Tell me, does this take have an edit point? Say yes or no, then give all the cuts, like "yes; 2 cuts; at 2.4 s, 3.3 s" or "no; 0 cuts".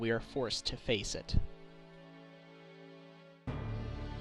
yes; 1 cut; at 2.5 s